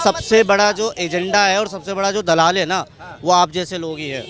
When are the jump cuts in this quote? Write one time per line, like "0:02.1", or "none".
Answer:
none